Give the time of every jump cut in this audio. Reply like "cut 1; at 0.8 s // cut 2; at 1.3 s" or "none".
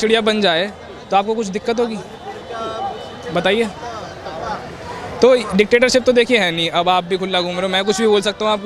none

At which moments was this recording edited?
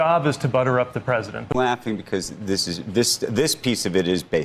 cut 1; at 1.5 s

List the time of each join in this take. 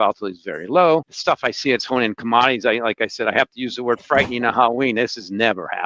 cut 1; at 1.1 s

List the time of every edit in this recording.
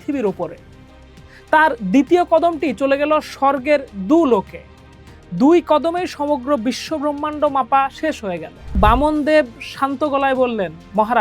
cut 1; at 8.8 s

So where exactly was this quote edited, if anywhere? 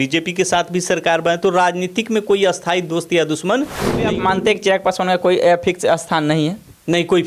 cut 1; at 4.1 s

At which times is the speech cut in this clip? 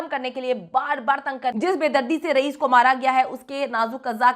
cut 1; at 1.6 s

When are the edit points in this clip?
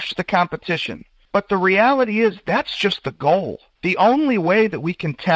cut 1; at 3.6 s

